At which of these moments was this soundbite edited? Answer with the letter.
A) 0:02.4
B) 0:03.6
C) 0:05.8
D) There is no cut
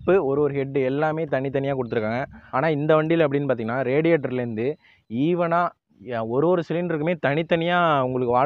A